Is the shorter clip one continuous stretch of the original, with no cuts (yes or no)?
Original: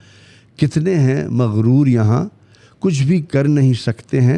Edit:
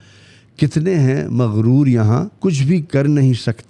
no